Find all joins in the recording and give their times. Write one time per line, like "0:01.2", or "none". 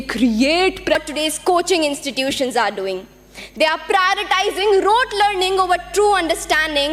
0:01.0